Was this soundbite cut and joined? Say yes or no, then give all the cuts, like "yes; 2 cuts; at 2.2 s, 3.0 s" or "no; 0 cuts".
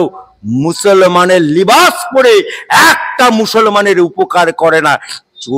no; 0 cuts